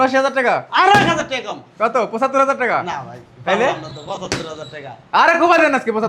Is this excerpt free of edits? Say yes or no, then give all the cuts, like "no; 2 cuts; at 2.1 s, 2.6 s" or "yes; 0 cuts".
yes; 0 cuts